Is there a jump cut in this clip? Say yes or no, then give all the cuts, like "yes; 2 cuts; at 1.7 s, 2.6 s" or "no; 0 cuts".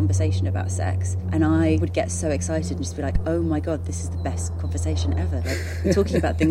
yes; 2 cuts; at 1.1 s, 1.8 s